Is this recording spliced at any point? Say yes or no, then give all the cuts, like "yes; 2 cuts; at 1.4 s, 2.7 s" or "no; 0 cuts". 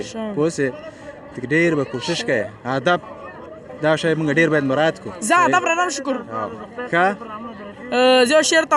no; 0 cuts